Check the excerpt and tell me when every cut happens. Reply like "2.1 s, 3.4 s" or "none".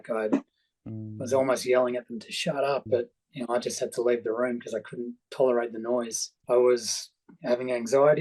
6.3 s